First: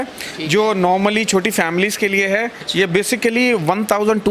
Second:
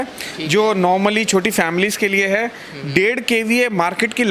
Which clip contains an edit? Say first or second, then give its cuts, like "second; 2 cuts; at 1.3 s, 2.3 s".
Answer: first; 1 cut; at 2.6 s